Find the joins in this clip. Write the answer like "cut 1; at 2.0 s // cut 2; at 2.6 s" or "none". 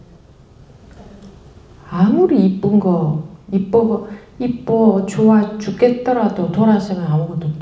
none